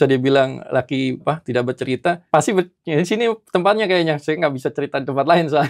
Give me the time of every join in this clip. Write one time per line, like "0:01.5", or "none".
0:01.2
0:02.2